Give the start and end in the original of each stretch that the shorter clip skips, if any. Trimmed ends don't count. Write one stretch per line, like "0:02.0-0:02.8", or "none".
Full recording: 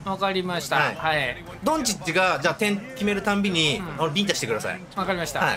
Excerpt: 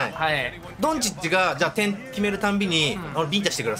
none